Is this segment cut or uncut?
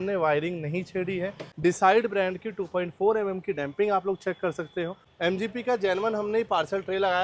cut